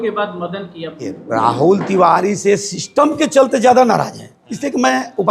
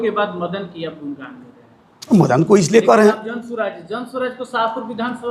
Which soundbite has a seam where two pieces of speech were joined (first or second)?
first